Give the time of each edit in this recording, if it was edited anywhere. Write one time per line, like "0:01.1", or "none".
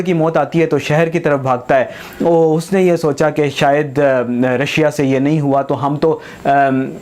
none